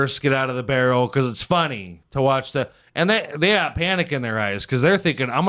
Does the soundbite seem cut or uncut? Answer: uncut